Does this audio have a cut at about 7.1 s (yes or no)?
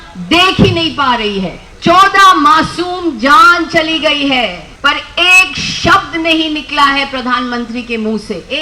no